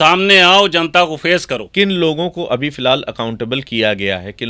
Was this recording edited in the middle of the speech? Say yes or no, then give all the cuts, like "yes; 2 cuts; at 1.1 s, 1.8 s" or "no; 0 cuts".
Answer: yes; 1 cut; at 1.7 s